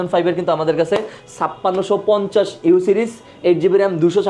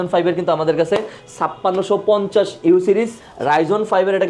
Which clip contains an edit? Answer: second; 1 cut; at 3.2 s

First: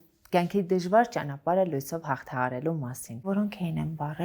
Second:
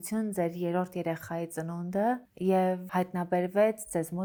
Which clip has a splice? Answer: first; 1 cut; at 3.2 s

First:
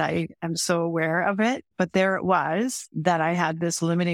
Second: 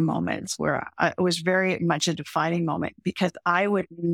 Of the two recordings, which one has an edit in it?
first; 2 cuts; at 1.7 s, 2.9 s

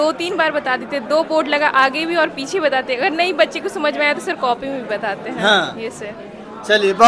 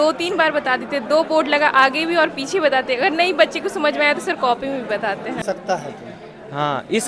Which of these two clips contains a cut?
second; 1 cut; at 5.4 s

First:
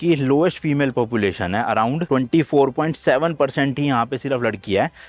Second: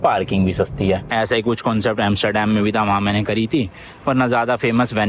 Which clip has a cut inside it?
second; 1 cut; at 1.1 s

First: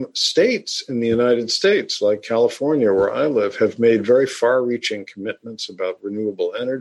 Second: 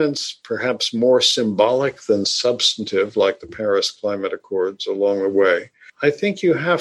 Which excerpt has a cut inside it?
second; 1 cut; at 5.8 s

